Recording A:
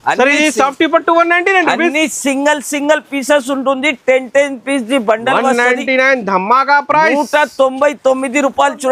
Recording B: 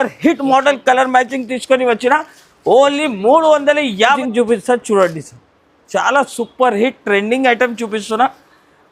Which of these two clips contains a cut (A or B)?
B